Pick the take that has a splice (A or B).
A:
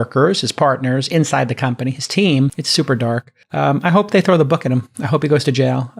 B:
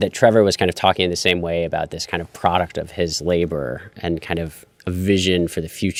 A